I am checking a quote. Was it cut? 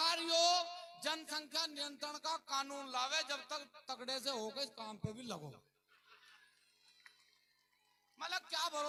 no; 0 cuts

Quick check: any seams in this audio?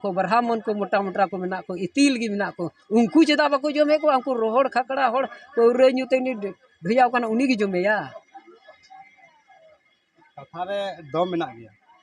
no; 0 cuts

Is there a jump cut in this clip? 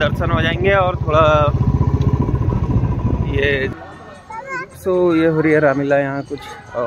yes; 1 cut; at 3.7 s

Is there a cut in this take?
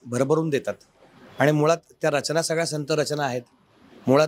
no; 0 cuts

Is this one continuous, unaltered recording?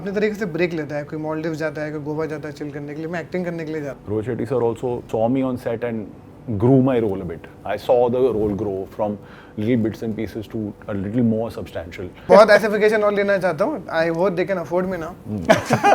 no; 2 cuts; at 3.9 s, 12.3 s

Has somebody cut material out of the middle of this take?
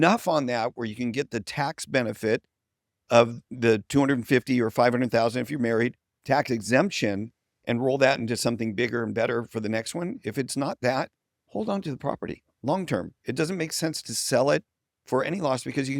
yes; 1 cut; at 6.1 s

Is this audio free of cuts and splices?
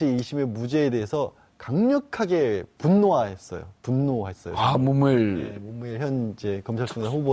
yes; 0 cuts

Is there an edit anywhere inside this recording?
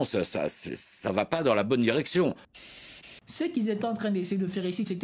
yes; 1 cut; at 2.6 s

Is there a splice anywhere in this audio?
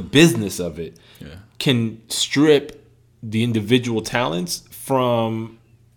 no; 0 cuts

